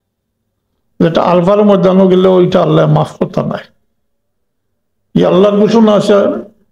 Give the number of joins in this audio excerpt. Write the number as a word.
zero